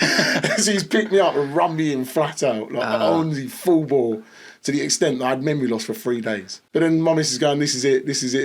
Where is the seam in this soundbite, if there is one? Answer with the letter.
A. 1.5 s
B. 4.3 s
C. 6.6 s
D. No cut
C